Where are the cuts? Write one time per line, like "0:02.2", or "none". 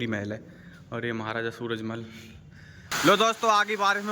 0:02.9